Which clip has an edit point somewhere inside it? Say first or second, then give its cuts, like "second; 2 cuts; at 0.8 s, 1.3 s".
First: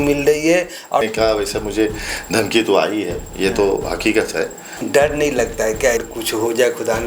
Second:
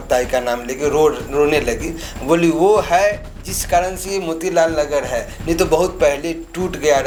first; 3 cuts; at 1.0 s, 4.8 s, 6.1 s